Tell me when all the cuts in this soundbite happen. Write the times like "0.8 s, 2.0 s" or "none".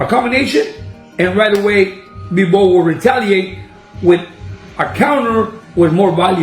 none